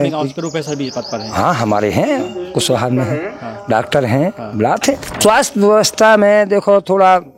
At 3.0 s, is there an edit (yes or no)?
no